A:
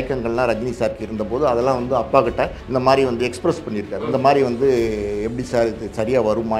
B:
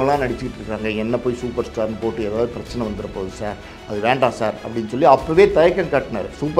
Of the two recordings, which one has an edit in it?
A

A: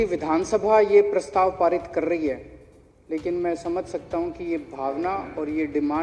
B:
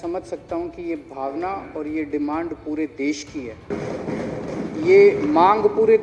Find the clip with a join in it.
B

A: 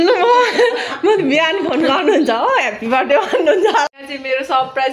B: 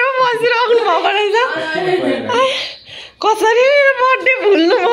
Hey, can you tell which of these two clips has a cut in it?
A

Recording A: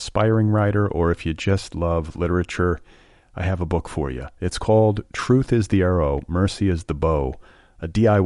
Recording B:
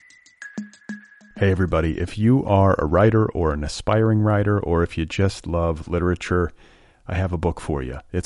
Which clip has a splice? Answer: B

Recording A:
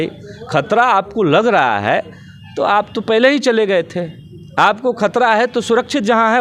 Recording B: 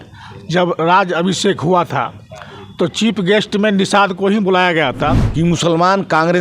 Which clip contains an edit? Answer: B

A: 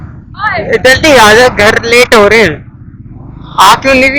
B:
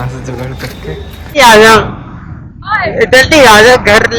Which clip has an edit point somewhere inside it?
B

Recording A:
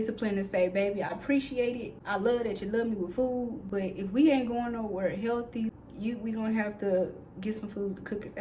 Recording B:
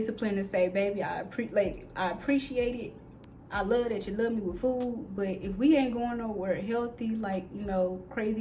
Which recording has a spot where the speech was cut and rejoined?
A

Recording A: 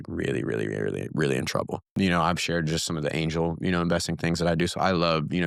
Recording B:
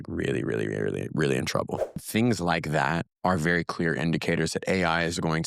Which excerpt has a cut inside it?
B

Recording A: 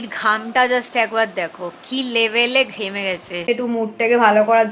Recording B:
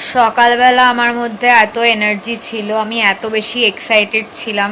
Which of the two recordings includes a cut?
A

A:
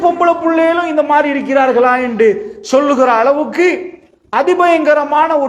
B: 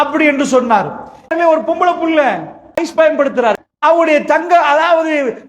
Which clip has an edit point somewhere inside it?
B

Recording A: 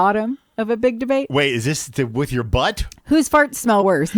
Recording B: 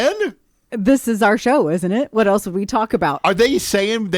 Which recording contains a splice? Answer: B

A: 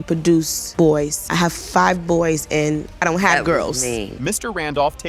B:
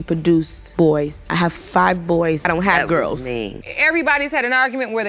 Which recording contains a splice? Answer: B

